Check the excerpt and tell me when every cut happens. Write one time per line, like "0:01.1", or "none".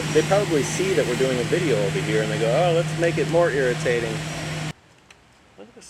0:04.7